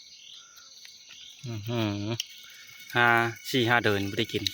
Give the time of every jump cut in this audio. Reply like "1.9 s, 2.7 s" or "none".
2.9 s